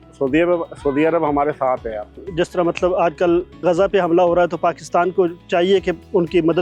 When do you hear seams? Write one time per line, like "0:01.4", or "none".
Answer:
0:02.2